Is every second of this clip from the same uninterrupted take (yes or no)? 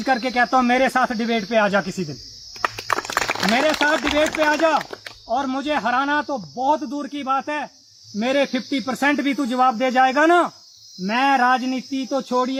yes